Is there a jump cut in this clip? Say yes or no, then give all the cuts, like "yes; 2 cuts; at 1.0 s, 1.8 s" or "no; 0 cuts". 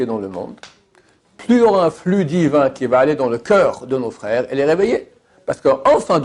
no; 0 cuts